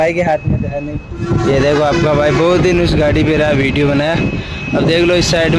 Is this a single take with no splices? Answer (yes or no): yes